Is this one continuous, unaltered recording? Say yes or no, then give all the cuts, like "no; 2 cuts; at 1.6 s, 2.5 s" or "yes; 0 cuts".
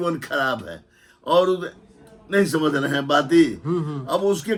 yes; 0 cuts